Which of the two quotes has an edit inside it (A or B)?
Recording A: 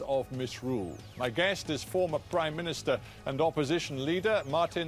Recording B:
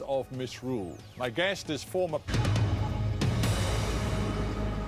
A